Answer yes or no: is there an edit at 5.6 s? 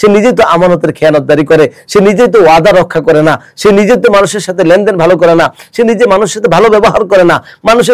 no